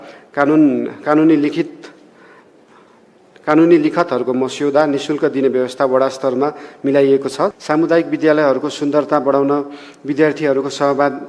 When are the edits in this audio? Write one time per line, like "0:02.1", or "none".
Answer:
0:07.5